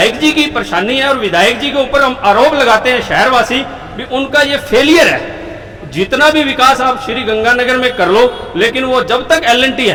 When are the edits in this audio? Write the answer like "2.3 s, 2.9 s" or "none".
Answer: none